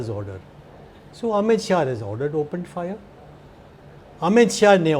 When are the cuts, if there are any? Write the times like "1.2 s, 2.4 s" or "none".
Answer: none